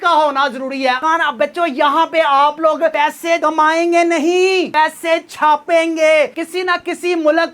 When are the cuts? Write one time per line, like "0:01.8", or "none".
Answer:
0:01.0
0:06.3